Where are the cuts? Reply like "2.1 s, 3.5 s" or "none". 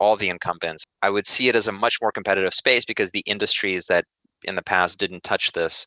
0.9 s